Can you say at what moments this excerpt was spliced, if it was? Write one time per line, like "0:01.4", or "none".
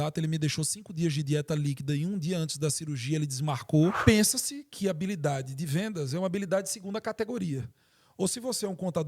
0:04.0